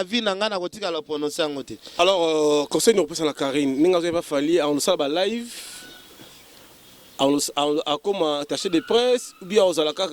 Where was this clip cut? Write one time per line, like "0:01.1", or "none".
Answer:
0:02.0